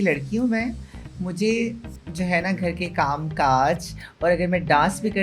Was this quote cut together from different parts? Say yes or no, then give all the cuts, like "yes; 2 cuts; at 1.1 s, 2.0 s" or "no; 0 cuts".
no; 0 cuts